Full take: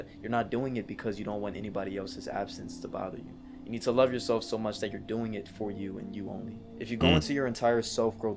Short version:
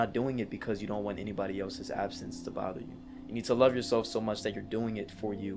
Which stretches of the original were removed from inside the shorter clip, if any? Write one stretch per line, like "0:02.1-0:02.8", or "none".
none